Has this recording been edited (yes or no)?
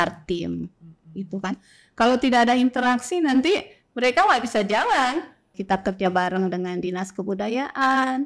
yes